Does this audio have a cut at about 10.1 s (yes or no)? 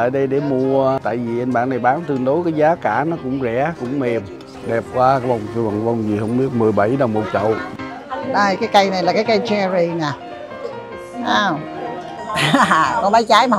no